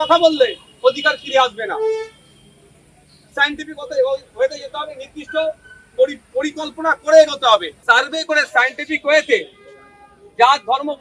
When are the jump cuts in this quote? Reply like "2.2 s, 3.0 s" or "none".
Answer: 7.7 s